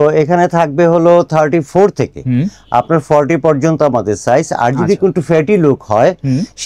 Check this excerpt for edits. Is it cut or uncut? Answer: uncut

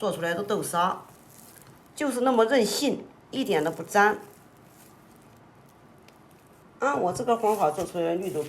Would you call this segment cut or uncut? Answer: cut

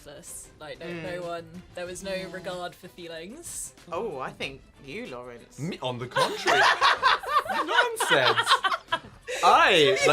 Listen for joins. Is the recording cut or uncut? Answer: cut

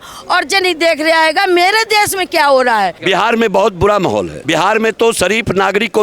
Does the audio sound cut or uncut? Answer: cut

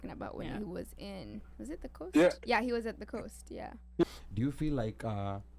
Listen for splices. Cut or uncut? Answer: cut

